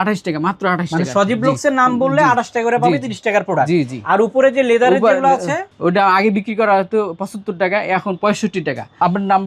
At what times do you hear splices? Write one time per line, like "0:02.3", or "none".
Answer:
none